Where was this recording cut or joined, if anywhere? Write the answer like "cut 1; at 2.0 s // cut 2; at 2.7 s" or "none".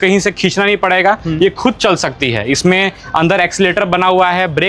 none